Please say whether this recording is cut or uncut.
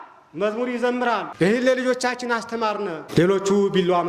cut